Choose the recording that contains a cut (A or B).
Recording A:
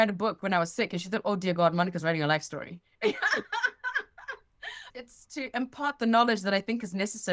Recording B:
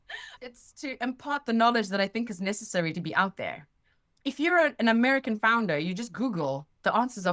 B